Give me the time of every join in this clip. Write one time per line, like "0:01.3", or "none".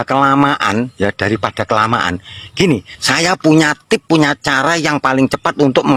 none